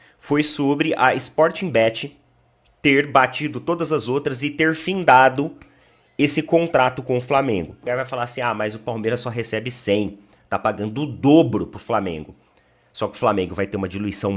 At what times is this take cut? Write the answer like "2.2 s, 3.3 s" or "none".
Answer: 7.8 s